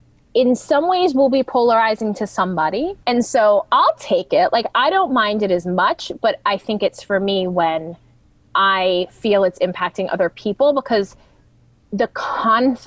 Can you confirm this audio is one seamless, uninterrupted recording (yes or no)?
no